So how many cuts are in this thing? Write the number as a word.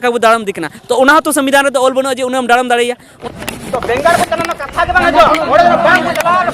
one